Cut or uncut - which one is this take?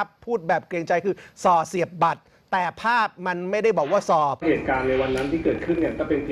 cut